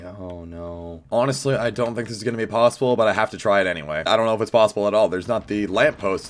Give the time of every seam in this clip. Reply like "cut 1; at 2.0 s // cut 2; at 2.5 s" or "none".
cut 1; at 1.0 s

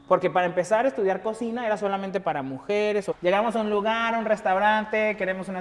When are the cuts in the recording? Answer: cut 1; at 3.1 s

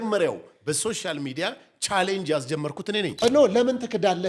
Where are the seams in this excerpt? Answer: cut 1; at 3.2 s

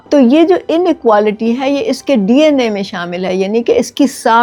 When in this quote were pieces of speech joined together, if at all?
none

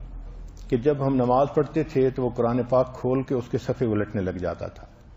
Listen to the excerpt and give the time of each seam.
cut 1; at 1.9 s

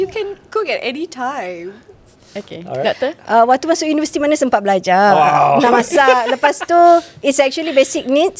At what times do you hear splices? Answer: none

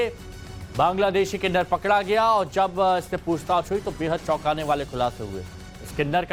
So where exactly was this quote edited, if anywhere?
none

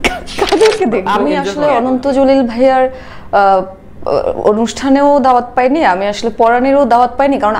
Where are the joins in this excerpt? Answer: cut 1; at 1.1 s

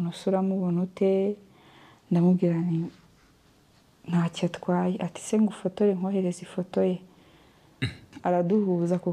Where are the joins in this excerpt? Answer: cut 1; at 8.1 s

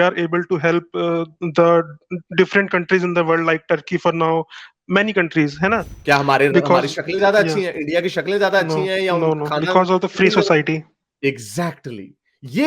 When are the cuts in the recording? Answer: cut 1; at 5.9 s

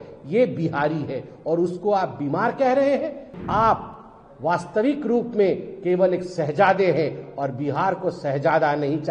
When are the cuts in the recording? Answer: cut 1; at 3.3 s

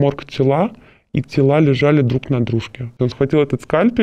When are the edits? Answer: cut 1; at 3.0 s

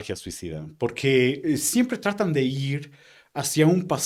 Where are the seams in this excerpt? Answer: none

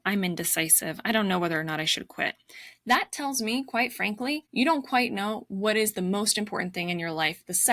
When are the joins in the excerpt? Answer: cut 1; at 4.5 s

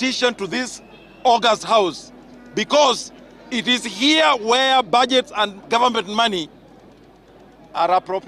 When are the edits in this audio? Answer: none

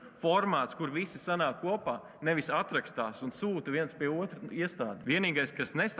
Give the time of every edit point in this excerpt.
cut 1; at 5.0 s

